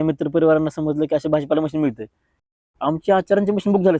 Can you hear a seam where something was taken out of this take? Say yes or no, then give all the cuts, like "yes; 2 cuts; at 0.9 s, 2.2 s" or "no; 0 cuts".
yes; 1 cut; at 2.4 s